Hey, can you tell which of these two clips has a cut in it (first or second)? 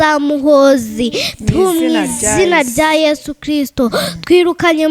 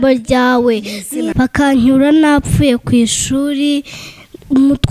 second